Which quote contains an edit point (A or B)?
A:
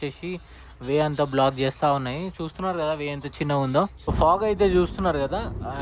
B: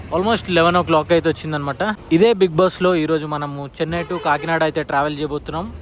A